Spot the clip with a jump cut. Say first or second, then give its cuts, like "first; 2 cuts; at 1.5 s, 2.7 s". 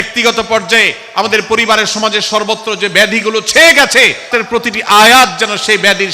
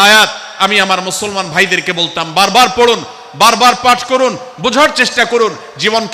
first; 1 cut; at 4.3 s